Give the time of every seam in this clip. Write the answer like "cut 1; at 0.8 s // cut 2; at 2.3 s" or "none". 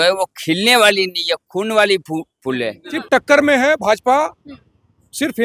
cut 1; at 3.0 s